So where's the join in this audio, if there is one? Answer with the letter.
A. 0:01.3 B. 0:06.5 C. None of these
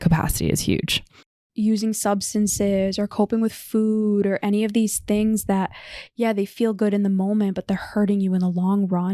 A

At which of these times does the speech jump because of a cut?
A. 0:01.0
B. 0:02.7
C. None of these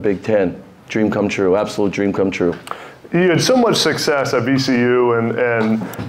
C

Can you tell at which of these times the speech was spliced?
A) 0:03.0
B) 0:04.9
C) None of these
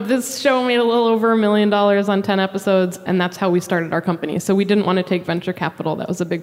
A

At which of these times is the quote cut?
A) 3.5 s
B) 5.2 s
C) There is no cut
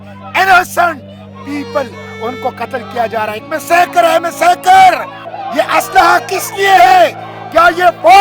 B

